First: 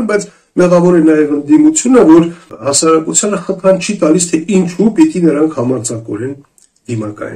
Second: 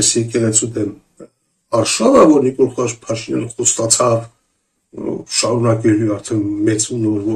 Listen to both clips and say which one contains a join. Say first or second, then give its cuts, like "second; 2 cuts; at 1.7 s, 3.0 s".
first; 1 cut; at 2.5 s